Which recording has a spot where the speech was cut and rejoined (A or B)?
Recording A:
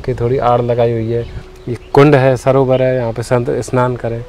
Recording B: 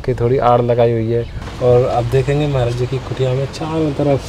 B